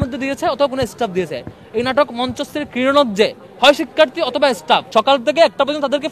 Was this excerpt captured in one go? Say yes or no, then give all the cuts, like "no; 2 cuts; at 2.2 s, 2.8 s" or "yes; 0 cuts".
no; 1 cut; at 4.9 s